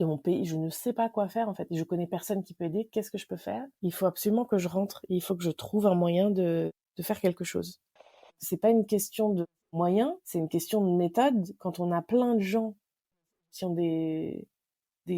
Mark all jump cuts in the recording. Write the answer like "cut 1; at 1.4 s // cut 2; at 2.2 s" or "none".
cut 1; at 8.2 s